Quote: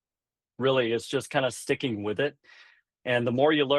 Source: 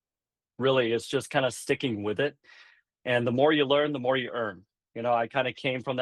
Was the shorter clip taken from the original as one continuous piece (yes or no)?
yes